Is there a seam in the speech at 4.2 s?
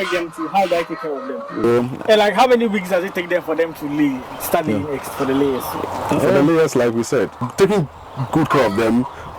no; 2 cuts; at 1.6 s, 7.5 s

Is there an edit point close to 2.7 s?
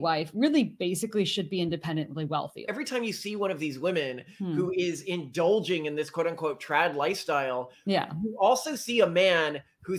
yes; 1 cut; at 2.7 s

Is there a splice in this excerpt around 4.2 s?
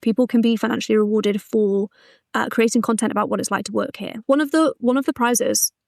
yes; 1 cut; at 4.2 s

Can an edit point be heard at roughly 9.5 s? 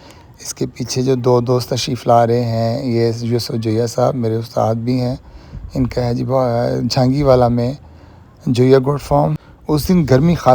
yes; 1 cut; at 9.5 s

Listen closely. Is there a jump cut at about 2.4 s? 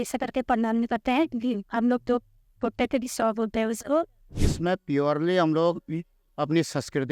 no; 1 cut; at 4.4 s

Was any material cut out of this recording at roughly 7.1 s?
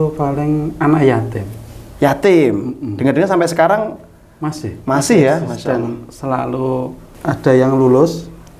yes; 1 cut; at 7.1 s

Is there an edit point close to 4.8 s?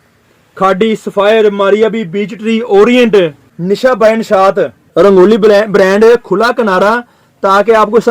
yes; 2 cuts; at 3.5 s, 4.8 s

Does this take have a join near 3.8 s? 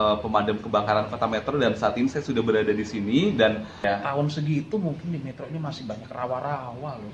yes; 1 cut; at 3.8 s

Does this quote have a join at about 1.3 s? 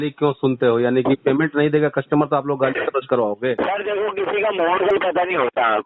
no; 1 cut; at 3.6 s

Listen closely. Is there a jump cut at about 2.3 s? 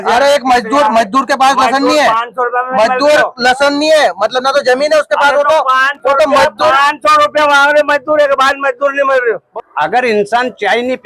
no; 1 cut; at 9.5 s

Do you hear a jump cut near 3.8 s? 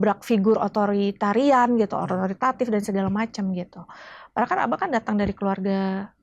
no; 0 cuts

